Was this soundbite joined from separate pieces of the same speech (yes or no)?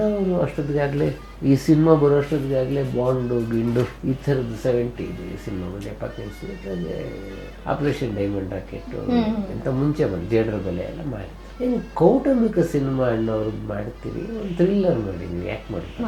no